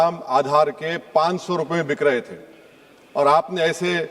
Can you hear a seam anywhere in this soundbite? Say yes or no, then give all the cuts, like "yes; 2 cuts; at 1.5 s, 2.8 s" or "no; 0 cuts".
no; 0 cuts